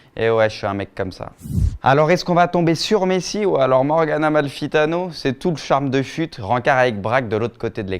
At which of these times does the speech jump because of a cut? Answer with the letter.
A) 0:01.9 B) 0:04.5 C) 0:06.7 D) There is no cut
B